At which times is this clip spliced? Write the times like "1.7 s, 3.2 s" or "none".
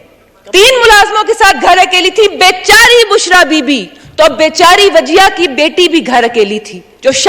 none